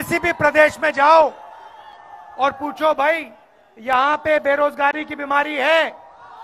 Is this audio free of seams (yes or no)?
yes